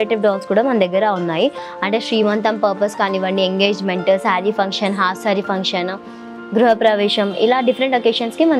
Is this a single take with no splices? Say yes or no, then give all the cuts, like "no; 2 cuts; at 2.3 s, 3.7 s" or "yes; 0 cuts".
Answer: yes; 0 cuts